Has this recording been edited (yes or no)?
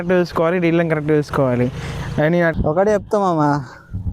yes